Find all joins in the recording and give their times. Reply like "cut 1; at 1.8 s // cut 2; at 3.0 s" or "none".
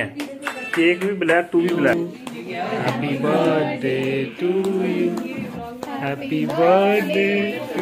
cut 1; at 1.9 s